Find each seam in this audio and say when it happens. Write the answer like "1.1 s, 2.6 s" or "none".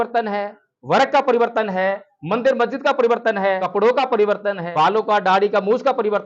3.6 s, 4.6 s